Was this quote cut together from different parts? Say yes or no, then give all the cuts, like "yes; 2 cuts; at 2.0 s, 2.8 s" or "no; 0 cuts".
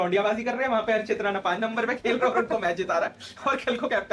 no; 0 cuts